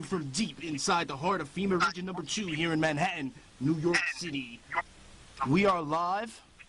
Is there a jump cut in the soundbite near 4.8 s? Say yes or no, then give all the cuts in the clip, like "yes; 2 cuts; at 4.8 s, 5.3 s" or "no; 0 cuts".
no; 0 cuts